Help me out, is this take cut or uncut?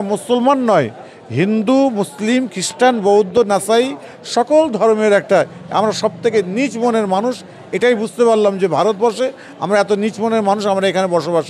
uncut